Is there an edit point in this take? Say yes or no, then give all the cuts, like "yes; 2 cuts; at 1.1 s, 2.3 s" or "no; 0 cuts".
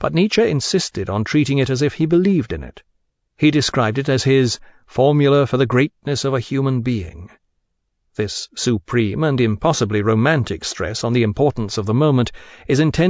yes; 1 cut; at 10.7 s